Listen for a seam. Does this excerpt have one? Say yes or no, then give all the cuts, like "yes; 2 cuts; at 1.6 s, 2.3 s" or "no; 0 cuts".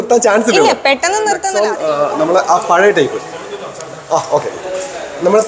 yes; 1 cut; at 1.5 s